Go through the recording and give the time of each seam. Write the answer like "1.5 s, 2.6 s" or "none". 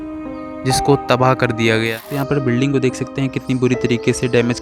2.1 s